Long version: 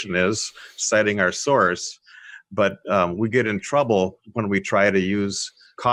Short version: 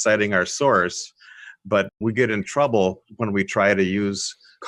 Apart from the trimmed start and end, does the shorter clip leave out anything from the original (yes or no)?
yes